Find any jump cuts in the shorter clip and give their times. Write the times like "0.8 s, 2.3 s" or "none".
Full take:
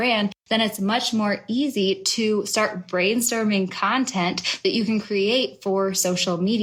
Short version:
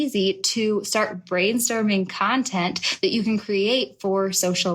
none